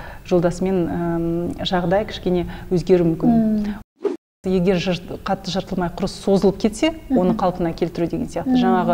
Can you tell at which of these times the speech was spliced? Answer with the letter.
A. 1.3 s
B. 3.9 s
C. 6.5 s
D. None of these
B